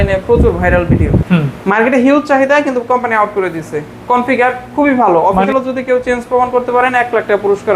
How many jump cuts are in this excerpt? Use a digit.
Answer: 2